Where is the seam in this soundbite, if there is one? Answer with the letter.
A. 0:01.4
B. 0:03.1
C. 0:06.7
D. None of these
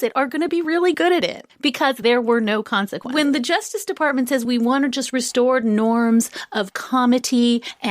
B